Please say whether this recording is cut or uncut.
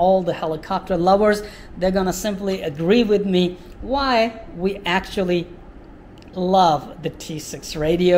uncut